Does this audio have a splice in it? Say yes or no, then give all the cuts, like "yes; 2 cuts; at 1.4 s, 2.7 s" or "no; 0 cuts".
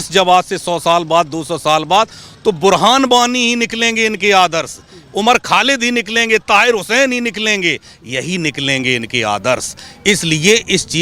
no; 0 cuts